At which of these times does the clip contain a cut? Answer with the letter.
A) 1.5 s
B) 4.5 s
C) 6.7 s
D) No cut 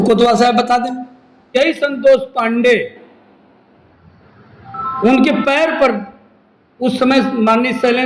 A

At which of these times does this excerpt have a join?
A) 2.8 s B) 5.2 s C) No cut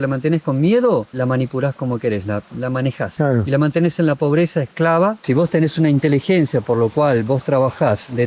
B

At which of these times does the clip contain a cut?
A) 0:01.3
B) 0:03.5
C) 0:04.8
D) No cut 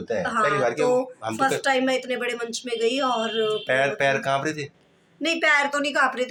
D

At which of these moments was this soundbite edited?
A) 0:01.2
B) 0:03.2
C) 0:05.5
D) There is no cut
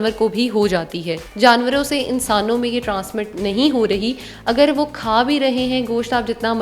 A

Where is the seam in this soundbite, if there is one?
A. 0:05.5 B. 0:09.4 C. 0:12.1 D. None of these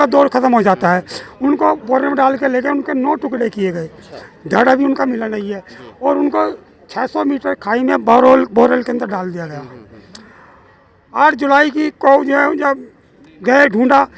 D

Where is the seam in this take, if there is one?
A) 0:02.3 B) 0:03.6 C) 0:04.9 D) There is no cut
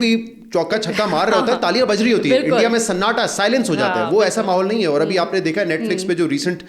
D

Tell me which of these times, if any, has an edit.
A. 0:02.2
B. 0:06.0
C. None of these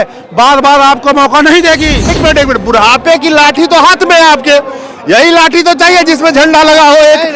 A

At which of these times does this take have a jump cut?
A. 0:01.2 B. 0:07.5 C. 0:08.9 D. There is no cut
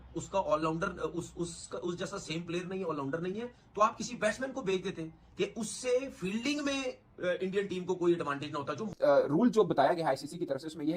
C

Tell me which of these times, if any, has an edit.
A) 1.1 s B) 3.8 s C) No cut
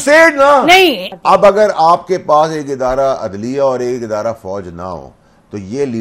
A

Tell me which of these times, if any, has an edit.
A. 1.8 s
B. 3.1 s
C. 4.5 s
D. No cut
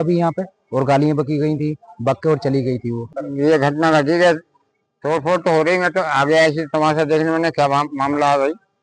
B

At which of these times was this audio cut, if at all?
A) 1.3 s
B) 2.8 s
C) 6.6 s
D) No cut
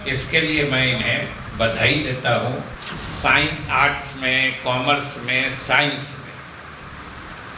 B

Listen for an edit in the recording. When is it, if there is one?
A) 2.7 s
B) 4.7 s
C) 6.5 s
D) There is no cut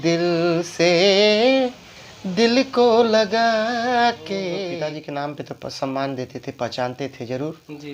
B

